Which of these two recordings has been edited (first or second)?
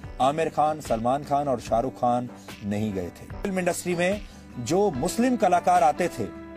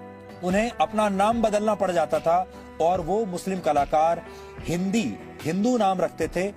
first